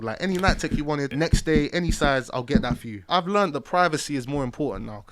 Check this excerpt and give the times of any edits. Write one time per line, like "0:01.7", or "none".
0:01.1
0:03.1